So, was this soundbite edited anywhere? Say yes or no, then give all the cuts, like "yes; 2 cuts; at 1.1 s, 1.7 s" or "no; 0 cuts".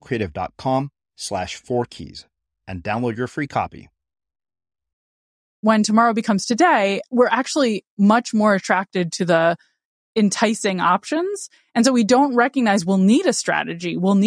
yes; 2 cuts; at 5.6 s, 7.0 s